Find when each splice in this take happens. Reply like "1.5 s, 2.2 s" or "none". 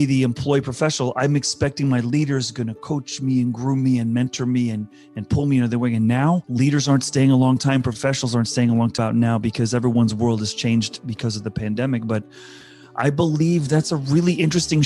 6.5 s, 8.9 s